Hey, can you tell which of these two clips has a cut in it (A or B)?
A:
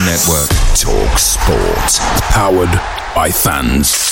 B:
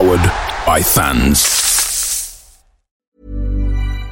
B